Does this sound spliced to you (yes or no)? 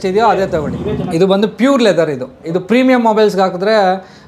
yes